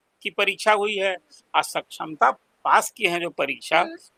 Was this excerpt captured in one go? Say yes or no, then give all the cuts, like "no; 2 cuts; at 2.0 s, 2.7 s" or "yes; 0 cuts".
yes; 0 cuts